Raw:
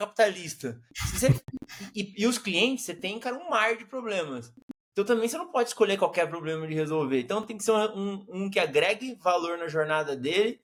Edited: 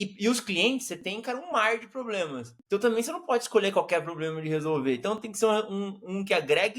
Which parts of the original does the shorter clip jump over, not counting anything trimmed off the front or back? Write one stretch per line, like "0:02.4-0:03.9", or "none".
0:04.5-0:04.7